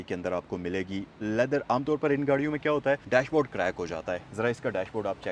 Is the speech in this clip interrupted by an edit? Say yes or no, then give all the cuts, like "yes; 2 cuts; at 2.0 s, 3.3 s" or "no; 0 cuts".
no; 0 cuts